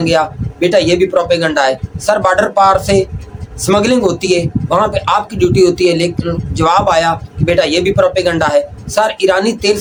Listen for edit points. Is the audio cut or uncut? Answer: uncut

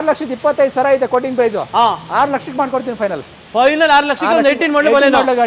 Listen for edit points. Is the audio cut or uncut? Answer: uncut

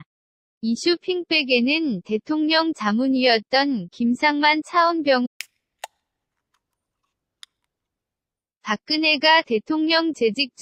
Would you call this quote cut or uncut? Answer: uncut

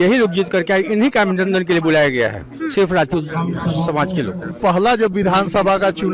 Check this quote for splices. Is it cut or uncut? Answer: cut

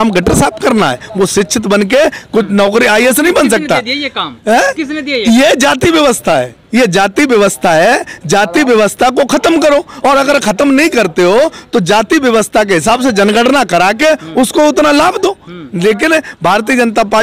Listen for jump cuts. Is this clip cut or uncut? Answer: uncut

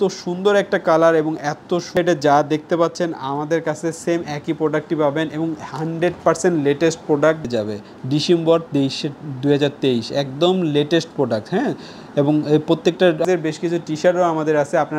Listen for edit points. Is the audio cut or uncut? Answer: cut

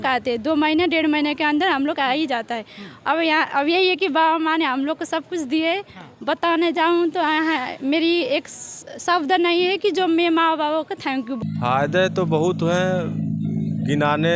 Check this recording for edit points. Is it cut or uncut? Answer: cut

